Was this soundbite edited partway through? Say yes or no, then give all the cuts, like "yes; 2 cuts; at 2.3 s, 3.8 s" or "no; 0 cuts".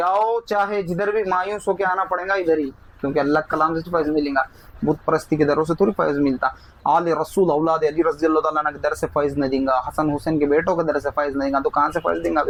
no; 0 cuts